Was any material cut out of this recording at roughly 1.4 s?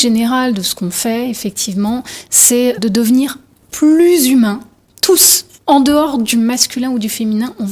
no; 0 cuts

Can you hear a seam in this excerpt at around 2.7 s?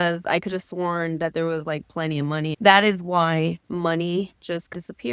no; 0 cuts

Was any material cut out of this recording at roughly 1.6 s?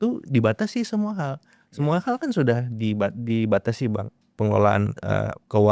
no; 0 cuts

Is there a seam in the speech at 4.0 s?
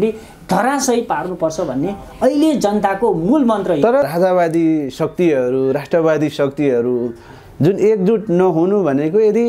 yes; 1 cut; at 4.0 s

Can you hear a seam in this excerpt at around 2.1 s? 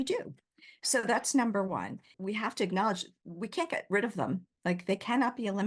yes; 1 cut; at 2.1 s

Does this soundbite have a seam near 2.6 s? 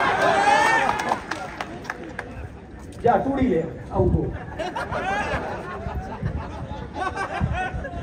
no; 0 cuts

